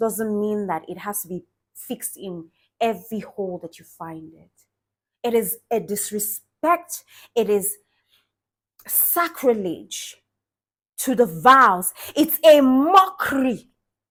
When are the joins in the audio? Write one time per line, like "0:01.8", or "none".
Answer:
none